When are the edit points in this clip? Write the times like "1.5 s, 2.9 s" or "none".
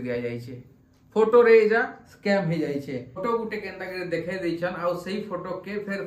3.2 s

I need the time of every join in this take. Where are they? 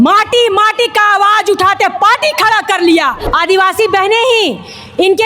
3.2 s

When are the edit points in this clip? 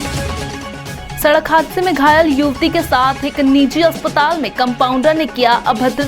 none

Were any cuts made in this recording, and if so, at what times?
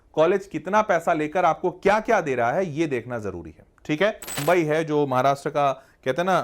4.3 s

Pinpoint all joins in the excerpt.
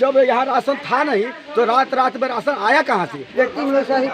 3.2 s

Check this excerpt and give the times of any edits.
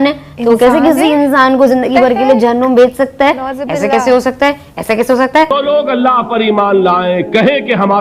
5.5 s

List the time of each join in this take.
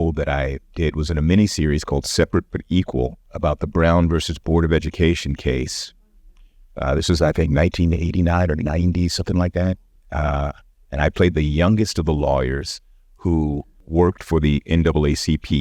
3.2 s, 13.8 s

